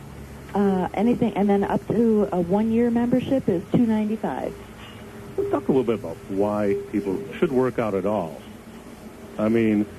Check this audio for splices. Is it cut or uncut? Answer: cut